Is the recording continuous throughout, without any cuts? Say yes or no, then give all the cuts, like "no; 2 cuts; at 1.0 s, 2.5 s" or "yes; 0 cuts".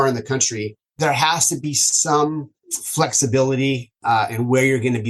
no; 2 cuts; at 1.0 s, 3.9 s